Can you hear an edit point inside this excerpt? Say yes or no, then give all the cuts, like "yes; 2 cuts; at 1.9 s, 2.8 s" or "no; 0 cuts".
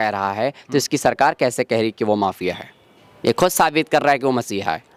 no; 0 cuts